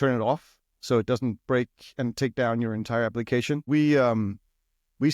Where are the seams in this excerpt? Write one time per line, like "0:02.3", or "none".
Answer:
0:03.7